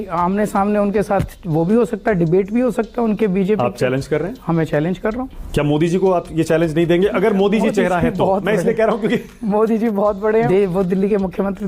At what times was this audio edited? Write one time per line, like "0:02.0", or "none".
0:05.4
0:10.5